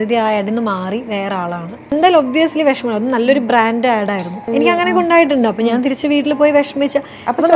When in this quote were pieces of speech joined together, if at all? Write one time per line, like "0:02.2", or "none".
0:01.9
0:04.3

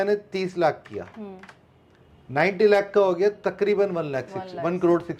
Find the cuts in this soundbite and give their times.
none

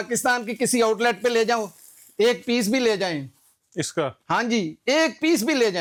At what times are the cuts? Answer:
none

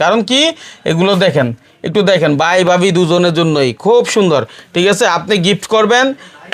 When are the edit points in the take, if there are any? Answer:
none

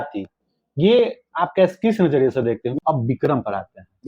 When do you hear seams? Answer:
0:02.7

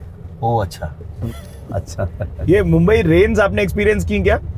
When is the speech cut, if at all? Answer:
0:01.2
0:02.4

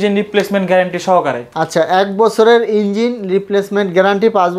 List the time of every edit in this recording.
none

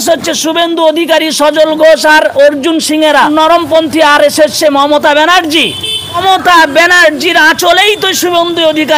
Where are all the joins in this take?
0:03.3
0:06.2

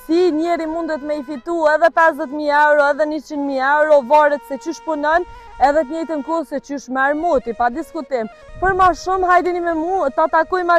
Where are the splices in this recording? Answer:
none

